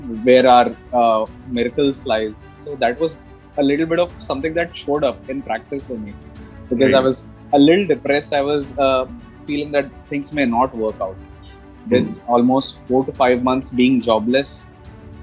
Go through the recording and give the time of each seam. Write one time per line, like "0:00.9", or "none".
none